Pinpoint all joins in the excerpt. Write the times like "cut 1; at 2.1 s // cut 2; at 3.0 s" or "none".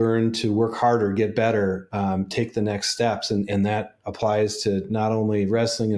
none